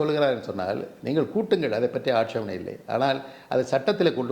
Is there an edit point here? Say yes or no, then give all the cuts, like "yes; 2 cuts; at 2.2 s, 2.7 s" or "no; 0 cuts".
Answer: no; 0 cuts